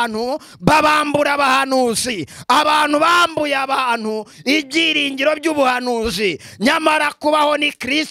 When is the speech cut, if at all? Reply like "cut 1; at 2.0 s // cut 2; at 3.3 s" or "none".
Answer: none